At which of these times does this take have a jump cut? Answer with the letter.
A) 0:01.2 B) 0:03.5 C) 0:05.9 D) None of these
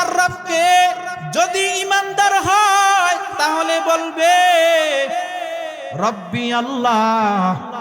A